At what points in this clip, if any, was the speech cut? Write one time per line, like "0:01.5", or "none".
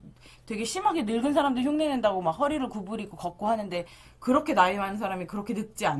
none